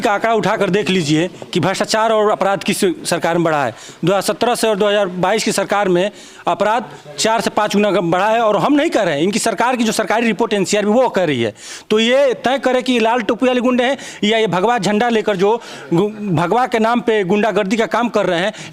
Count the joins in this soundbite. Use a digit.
0